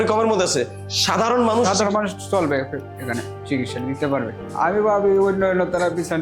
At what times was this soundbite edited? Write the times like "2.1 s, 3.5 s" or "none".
4.4 s